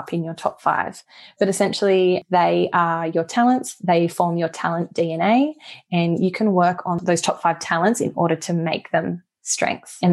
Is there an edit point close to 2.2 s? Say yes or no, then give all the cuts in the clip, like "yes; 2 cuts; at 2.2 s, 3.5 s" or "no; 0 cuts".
yes; 2 cuts; at 2.2 s, 7.0 s